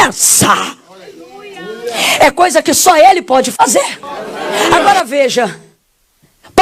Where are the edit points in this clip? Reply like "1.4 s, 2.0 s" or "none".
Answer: 4.7 s